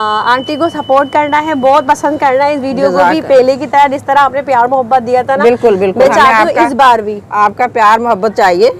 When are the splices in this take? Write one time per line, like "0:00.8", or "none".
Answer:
none